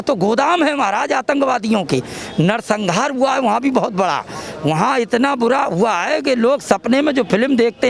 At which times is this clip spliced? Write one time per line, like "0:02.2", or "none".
none